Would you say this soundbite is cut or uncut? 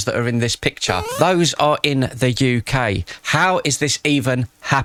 uncut